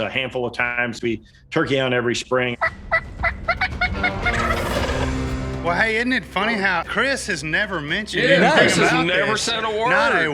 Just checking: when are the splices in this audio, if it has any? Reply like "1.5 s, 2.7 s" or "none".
2.5 s, 5.6 s